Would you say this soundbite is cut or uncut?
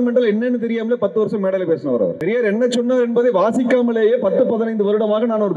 cut